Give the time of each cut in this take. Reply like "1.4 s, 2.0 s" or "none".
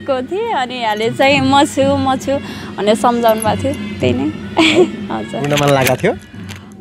none